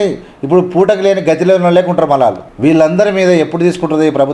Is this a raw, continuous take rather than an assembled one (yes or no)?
no